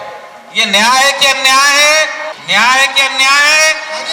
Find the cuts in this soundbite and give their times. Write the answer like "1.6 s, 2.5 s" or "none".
2.3 s